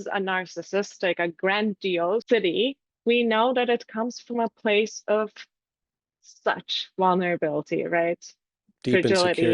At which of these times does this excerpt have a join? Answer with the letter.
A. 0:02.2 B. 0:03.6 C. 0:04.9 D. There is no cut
A